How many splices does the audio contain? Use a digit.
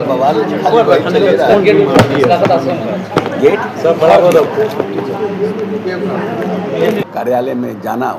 1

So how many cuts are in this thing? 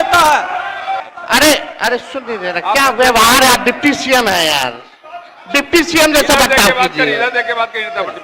1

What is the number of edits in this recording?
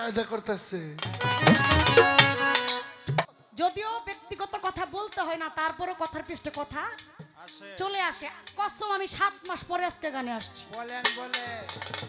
1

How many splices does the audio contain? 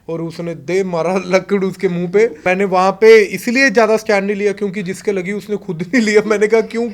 1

